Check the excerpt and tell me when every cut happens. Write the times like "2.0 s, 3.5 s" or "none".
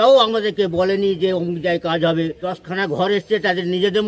2.5 s